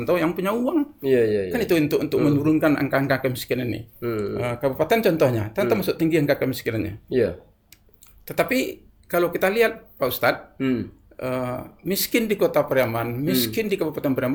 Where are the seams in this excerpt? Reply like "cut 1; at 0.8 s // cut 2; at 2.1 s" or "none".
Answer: none